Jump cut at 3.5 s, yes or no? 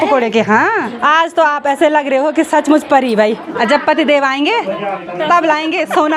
yes